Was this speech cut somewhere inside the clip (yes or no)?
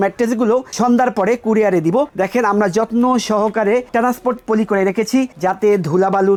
no